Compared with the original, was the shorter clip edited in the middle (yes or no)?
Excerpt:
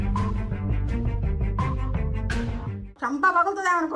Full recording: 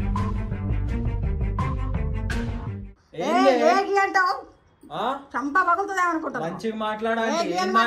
yes